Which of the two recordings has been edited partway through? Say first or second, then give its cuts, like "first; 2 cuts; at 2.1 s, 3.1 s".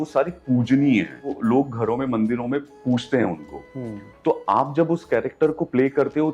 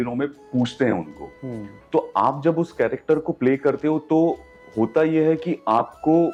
first; 1 cut; at 1.4 s